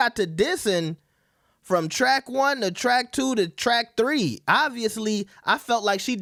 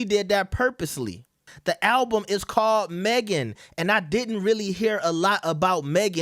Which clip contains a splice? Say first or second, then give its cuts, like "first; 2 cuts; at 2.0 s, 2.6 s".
second; 1 cut; at 1.5 s